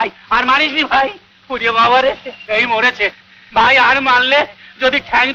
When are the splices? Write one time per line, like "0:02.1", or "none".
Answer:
0:02.3